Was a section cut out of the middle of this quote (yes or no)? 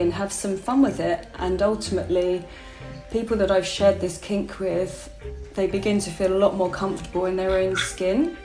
no